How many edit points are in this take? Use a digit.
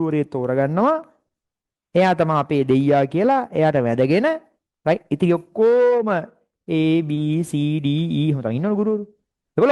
0